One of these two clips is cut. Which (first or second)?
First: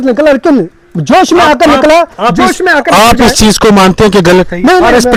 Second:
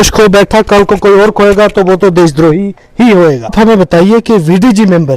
second